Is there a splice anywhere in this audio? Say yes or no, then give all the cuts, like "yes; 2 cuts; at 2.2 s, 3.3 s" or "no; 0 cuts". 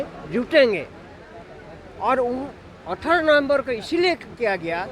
no; 0 cuts